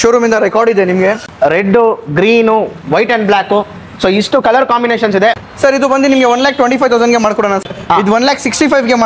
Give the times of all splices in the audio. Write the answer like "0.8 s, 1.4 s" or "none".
1.3 s, 5.4 s, 7.6 s